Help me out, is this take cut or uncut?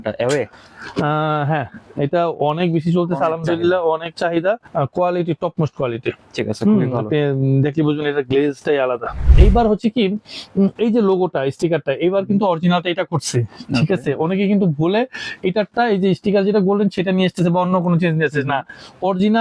cut